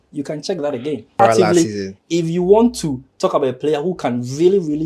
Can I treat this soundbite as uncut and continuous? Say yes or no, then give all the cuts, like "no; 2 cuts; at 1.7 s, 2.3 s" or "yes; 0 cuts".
no; 1 cut; at 1.2 s